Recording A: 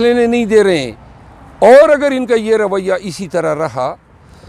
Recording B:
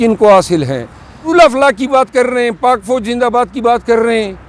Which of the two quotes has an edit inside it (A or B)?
B